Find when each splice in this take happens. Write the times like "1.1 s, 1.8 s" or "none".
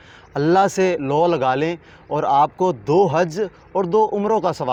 none

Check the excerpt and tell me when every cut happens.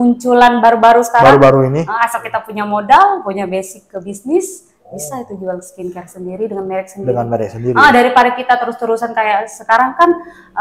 none

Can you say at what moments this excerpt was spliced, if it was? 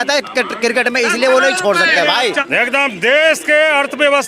2.4 s

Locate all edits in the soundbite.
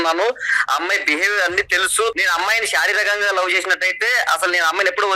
2.1 s

